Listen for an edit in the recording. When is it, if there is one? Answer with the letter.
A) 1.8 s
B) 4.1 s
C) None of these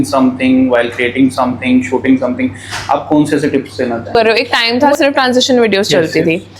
B